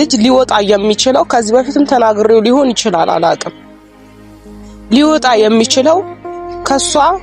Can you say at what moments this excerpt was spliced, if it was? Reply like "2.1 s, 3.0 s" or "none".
3.5 s, 4.9 s